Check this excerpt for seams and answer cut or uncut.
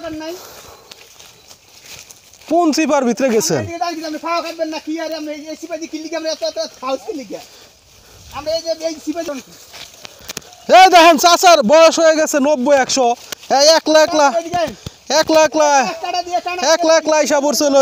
cut